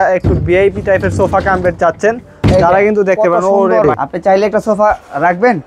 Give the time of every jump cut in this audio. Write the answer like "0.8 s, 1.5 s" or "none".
3.9 s